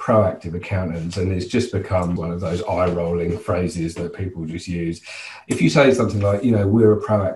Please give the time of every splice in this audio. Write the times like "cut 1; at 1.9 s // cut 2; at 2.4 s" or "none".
cut 1; at 2.2 s // cut 2; at 5.3 s